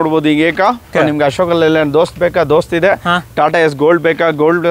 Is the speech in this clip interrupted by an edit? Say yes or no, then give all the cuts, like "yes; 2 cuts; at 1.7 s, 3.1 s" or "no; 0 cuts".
yes; 1 cut; at 0.9 s